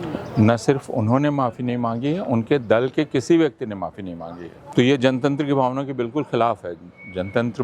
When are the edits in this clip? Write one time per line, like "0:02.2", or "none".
0:04.5